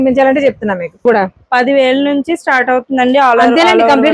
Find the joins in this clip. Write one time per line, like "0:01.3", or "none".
0:01.0